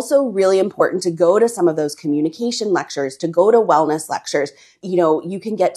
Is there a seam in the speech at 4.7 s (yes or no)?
yes